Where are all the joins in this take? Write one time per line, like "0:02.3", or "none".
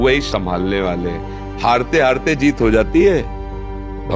none